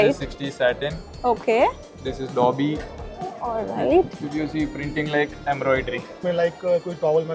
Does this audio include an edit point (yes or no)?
yes